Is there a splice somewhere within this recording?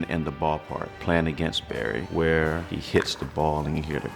yes; 2 cuts; at 0.9 s, 2.1 s

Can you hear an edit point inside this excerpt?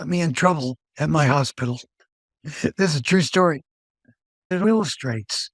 yes; 1 cut; at 4.6 s

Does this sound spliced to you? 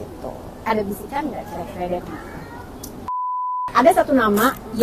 yes; 1 cut; at 3.4 s

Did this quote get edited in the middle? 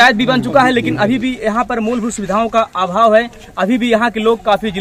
no; 0 cuts

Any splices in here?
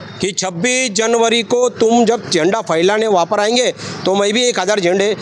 no; 0 cuts

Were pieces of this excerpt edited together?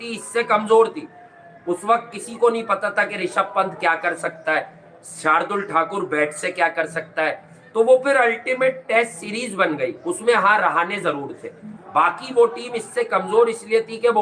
no; 0 cuts

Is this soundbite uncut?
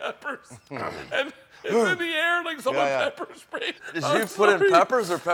no; 1 cut; at 3.8 s

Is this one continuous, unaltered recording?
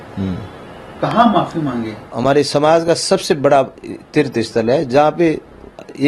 no; 1 cut; at 2.1 s

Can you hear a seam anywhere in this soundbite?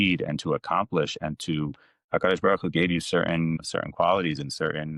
no; 0 cuts

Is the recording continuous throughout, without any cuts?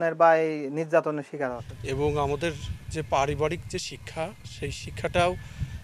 no; 1 cut; at 1.6 s

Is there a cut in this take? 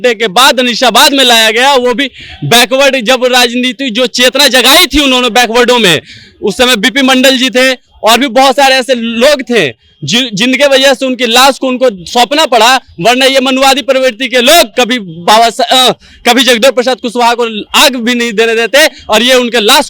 no; 0 cuts

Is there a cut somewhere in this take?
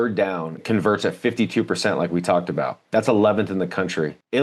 no; 0 cuts

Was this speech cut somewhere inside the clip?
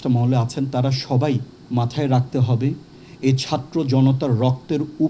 yes; 1 cut; at 1.5 s

